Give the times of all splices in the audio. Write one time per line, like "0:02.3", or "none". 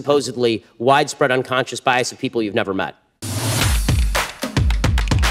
0:03.3